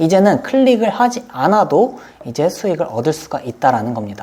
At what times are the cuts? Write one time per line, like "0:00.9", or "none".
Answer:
none